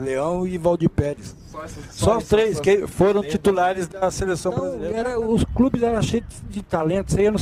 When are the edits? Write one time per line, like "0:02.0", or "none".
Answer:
0:04.8